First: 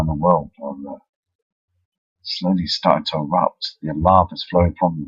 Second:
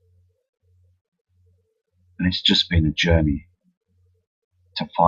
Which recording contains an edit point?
first; 1 cut; at 3.7 s

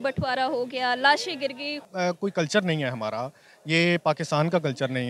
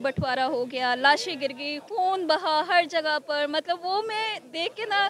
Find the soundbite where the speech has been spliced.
first; 1 cut; at 1.8 s

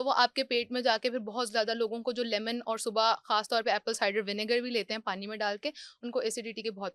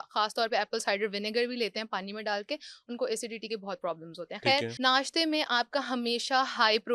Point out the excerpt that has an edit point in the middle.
second; 1 cut; at 4.7 s

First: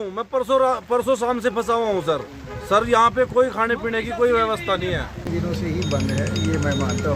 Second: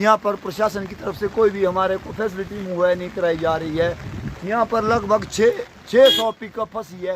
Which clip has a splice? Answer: first; 1 cut; at 5.3 s

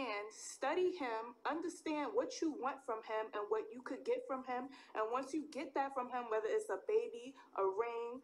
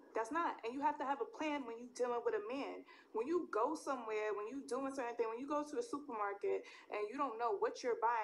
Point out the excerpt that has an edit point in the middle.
second; 1 cut; at 3.3 s

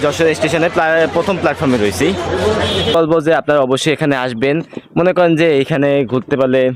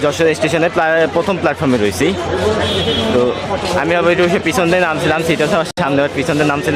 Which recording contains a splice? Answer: first; 1 cut; at 2.9 s

